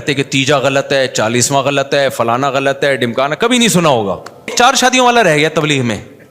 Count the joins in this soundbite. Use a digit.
1